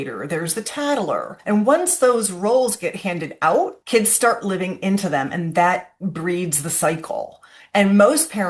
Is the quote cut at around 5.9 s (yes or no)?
no